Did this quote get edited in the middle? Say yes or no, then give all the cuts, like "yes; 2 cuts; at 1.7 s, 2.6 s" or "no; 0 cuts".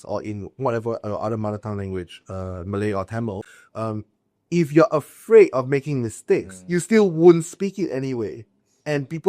yes; 1 cut; at 3.4 s